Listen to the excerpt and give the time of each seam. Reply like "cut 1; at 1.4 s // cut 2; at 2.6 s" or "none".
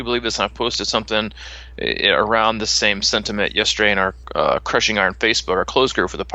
cut 1; at 4.2 s